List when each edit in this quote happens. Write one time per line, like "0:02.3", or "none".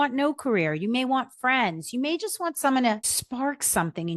0:03.2